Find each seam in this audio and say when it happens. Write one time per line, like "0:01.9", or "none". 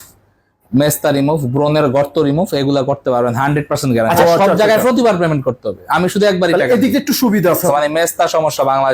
0:04.2
0:07.7

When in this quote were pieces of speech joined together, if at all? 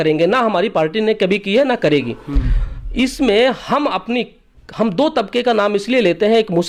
none

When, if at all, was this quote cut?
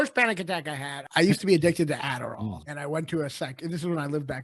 0:00.9
0:02.4

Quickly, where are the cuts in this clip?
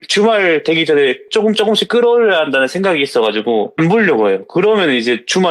0:03.7

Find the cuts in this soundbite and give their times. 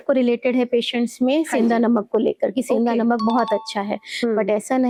none

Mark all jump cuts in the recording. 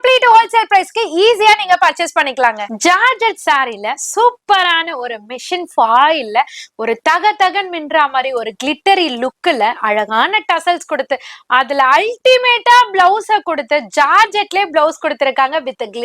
0:02.7

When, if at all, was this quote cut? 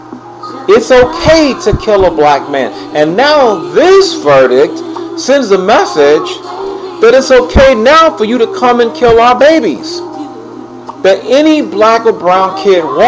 0:09.2

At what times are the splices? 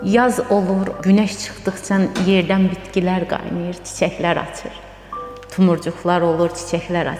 0:01.0

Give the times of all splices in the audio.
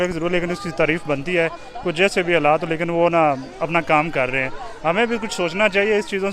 none

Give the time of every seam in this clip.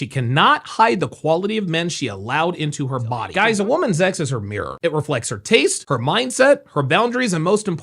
0:03.3

